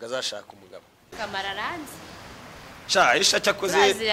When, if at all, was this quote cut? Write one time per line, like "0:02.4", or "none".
0:01.1